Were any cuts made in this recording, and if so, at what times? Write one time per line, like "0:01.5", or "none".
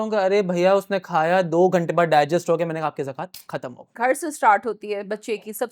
0:03.9